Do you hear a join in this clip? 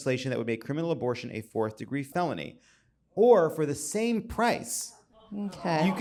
no; 0 cuts

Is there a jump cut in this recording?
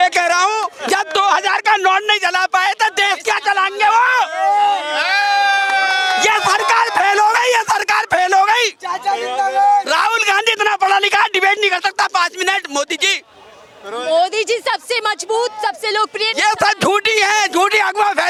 no; 0 cuts

